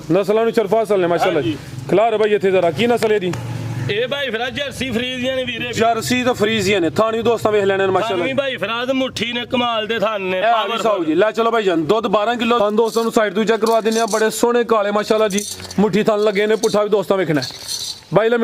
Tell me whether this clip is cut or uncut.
cut